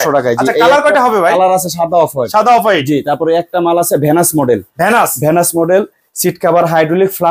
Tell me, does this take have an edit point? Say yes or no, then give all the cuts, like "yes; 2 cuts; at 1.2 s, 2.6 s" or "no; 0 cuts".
no; 0 cuts